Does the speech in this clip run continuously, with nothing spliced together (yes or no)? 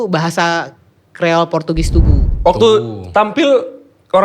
no